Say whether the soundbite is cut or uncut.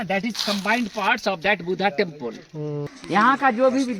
cut